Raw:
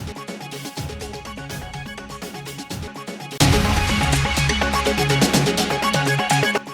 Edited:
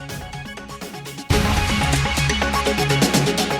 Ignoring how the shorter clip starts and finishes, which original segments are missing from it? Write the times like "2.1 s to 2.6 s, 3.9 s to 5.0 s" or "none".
2.7 s to 3.5 s